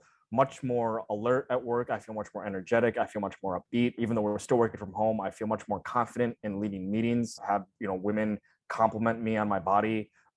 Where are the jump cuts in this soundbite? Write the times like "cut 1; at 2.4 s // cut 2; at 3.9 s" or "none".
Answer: cut 1; at 4.0 s // cut 2; at 7.4 s